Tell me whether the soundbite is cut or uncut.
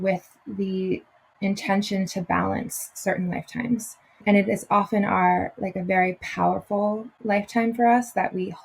cut